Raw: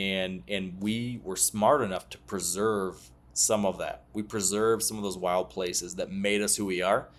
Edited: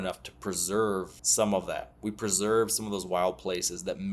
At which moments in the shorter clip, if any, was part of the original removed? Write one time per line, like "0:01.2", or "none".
0:01.2